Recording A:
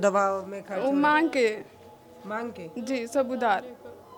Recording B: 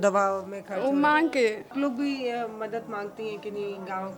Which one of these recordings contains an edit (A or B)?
B